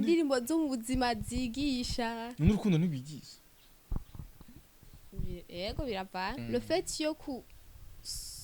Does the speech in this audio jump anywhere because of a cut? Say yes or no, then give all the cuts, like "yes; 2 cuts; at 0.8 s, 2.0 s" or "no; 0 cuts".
yes; 1 cut; at 6.4 s